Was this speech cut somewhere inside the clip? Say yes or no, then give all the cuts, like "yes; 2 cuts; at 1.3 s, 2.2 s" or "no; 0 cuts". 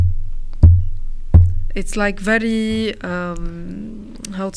no; 0 cuts